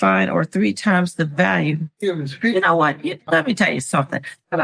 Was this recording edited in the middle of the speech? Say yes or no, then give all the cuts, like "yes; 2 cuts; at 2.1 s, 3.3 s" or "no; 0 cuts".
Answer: no; 0 cuts